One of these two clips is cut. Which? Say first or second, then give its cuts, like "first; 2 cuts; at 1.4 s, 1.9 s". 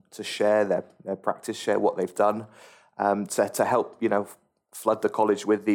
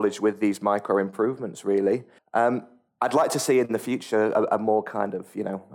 second; 2 cuts; at 2.2 s, 2.8 s